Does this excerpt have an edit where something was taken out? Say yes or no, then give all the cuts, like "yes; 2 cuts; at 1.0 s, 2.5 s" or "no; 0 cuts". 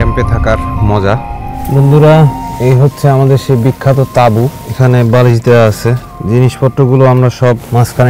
yes; 1 cut; at 4.7 s